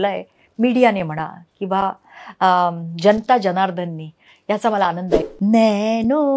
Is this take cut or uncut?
cut